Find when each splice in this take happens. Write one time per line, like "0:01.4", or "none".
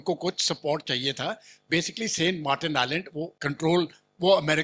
0:03.4